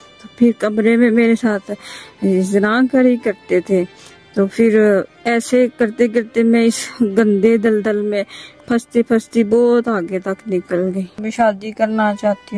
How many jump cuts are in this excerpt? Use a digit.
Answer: 1